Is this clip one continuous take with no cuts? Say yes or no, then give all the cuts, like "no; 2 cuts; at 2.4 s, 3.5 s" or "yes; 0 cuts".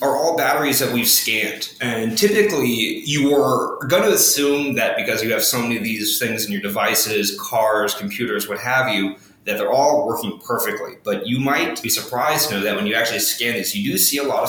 yes; 0 cuts